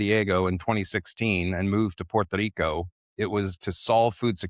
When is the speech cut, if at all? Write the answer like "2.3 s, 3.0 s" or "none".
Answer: none